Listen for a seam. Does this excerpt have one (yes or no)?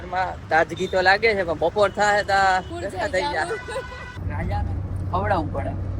yes